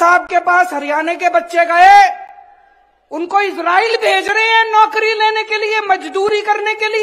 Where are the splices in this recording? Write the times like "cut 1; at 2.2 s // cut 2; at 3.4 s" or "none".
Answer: none